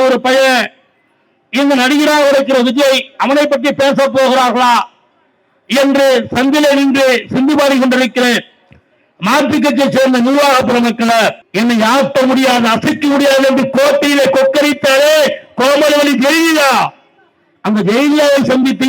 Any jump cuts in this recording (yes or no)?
yes